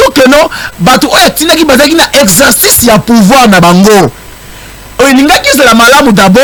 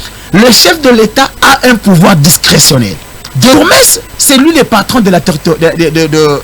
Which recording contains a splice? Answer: second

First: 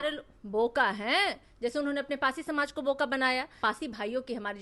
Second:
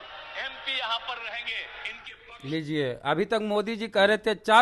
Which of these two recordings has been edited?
first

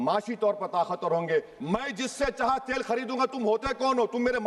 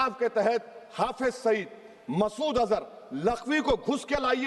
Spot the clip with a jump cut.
first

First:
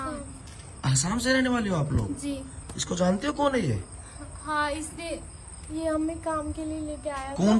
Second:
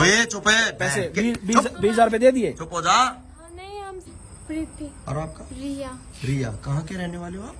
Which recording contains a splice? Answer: second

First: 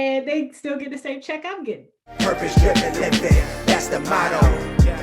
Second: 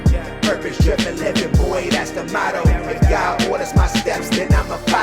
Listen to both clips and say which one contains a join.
first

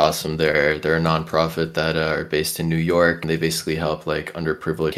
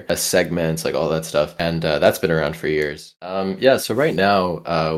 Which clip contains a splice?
second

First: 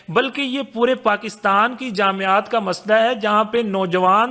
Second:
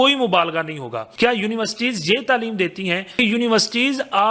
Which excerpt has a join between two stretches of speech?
second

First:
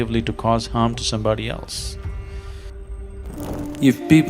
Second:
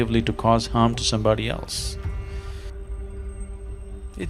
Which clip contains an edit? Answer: first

